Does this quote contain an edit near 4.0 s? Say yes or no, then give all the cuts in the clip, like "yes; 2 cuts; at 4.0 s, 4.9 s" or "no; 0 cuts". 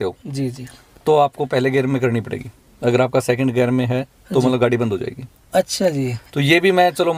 no; 0 cuts